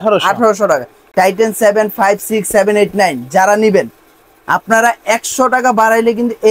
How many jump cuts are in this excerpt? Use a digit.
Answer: 1